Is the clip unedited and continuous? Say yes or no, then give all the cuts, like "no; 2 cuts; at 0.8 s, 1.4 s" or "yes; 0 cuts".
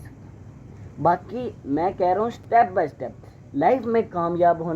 yes; 0 cuts